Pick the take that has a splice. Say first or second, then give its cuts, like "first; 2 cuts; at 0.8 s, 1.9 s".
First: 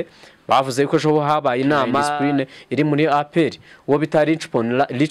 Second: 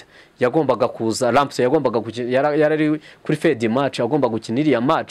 first; 1 cut; at 2.1 s